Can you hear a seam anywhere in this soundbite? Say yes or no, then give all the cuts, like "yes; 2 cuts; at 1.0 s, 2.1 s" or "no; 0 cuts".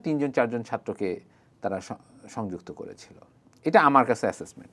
no; 0 cuts